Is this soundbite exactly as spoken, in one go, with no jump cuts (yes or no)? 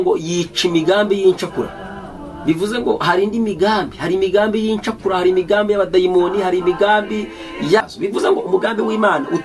no